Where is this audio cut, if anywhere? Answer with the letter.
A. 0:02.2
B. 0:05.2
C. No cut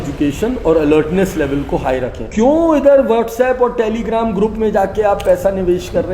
A